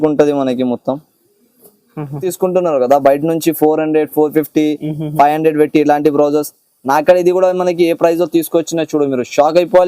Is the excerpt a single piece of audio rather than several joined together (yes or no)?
no